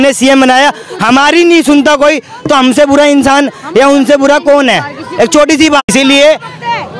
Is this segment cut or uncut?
cut